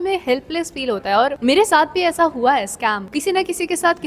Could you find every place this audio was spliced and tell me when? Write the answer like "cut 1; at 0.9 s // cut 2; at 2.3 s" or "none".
cut 1; at 1.4 s // cut 2; at 3.0 s